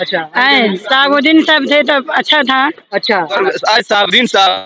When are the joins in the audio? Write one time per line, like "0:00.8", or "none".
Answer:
0:03.4